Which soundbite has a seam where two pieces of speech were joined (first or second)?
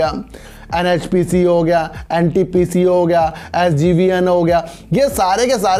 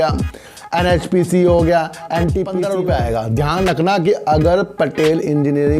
second